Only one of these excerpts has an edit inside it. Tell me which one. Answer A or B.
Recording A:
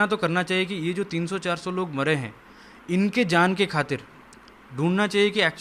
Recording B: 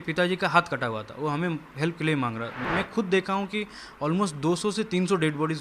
B